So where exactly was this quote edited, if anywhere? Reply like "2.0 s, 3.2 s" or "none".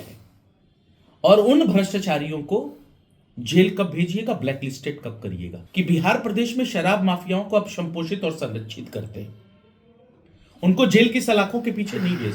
5.5 s

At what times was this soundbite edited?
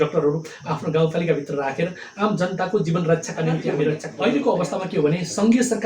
4.0 s

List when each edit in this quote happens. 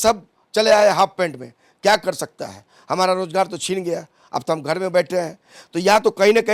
none

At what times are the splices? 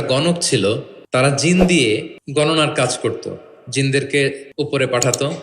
0.9 s, 2.2 s, 4.4 s

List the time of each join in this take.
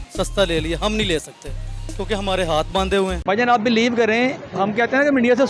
3.2 s

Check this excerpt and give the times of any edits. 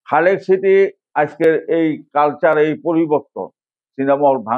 1.0 s

